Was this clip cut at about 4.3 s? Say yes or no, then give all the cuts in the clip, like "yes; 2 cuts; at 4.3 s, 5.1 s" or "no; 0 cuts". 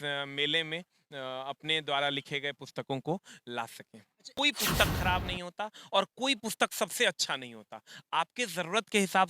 yes; 1 cut; at 4.3 s